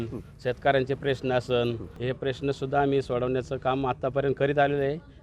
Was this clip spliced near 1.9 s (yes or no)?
yes